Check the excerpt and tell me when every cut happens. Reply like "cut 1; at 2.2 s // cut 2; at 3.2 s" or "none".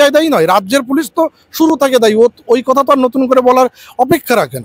none